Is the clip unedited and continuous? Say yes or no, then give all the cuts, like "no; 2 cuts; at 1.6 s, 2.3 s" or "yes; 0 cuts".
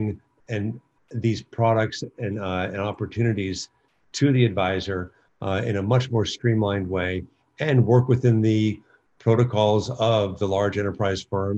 yes; 0 cuts